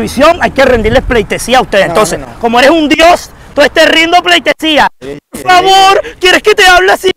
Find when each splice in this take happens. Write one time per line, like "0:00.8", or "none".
none